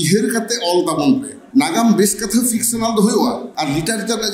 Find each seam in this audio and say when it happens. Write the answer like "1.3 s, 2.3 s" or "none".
1.3 s, 3.5 s